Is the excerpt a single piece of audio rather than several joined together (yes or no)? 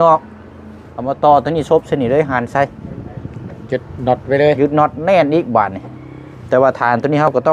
yes